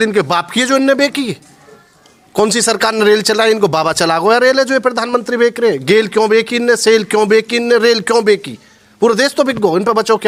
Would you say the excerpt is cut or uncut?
uncut